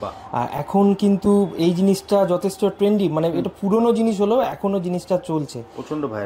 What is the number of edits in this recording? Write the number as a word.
zero